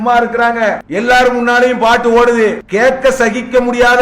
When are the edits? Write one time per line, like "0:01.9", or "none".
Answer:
0:00.8
0:02.6